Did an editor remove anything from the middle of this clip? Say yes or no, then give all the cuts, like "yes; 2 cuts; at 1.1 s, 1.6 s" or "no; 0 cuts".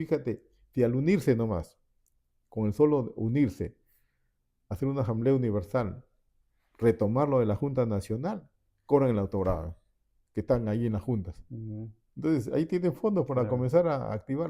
no; 0 cuts